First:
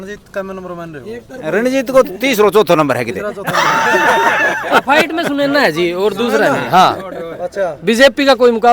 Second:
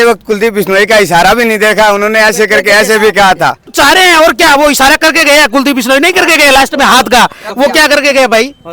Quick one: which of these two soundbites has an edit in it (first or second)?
second